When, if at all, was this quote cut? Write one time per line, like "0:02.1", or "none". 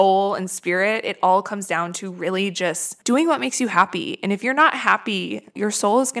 none